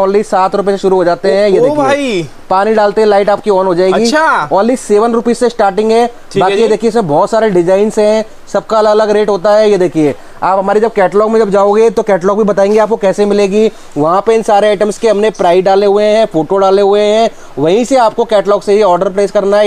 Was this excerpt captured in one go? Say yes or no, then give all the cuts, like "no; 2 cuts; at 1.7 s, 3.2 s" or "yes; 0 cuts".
yes; 0 cuts